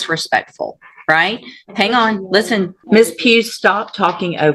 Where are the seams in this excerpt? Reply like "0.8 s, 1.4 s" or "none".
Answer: 2.8 s